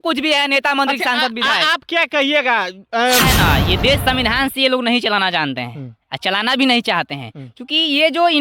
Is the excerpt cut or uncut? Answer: cut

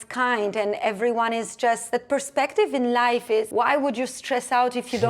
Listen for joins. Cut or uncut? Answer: cut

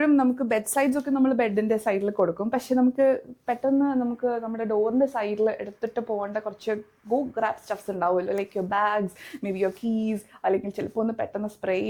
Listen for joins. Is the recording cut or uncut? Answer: uncut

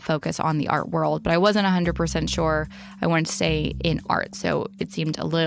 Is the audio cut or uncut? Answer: uncut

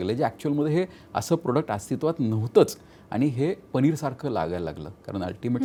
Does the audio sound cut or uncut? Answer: uncut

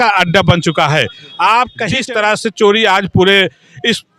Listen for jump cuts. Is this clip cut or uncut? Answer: cut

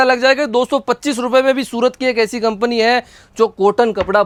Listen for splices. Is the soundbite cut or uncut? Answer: uncut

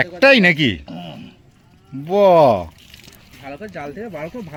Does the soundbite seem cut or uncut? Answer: uncut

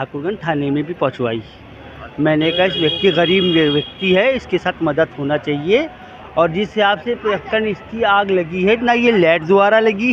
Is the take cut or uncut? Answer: uncut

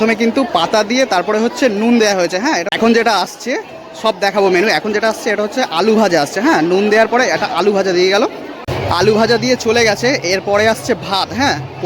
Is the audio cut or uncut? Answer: cut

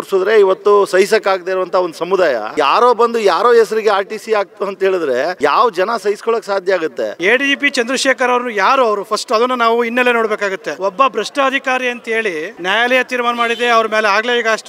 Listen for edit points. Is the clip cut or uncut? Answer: cut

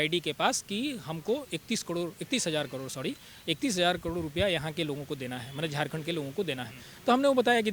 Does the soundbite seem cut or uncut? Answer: uncut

